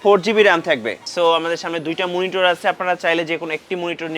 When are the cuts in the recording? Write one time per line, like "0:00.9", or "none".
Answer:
0:01.0